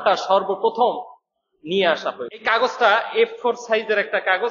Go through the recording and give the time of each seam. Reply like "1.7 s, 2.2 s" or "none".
2.4 s